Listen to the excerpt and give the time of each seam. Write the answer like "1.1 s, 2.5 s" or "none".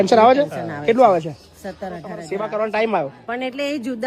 2.3 s